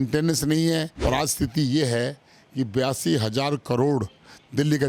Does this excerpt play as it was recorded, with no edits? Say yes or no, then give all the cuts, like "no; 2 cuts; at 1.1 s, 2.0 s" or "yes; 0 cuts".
no; 1 cut; at 0.9 s